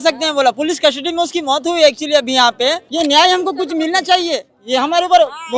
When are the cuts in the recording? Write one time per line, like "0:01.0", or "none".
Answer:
0:02.8